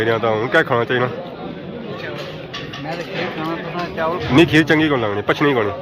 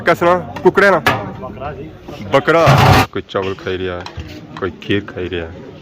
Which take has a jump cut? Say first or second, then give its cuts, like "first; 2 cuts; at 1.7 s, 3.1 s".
second; 1 cut; at 3.1 s